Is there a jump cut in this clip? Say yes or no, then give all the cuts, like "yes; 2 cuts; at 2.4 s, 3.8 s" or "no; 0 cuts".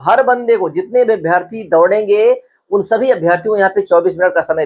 no; 0 cuts